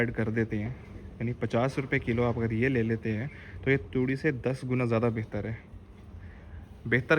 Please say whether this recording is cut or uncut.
uncut